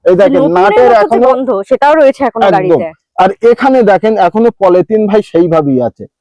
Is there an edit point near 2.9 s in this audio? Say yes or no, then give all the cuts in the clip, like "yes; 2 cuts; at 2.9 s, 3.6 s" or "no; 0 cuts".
no; 0 cuts